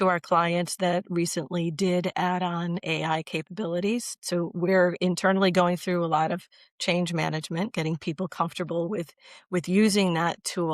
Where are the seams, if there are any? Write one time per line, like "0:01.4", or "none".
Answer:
0:04.2